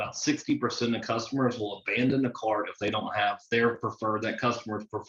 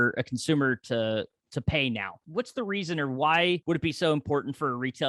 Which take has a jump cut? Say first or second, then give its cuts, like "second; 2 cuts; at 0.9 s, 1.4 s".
second; 2 cuts; at 2.2 s, 3.6 s